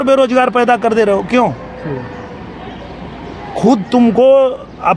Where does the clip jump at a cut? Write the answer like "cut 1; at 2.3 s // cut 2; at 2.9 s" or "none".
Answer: none